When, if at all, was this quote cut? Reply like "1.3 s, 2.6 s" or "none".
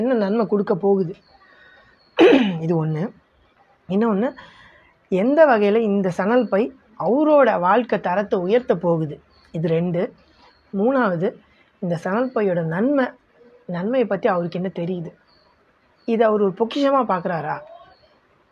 none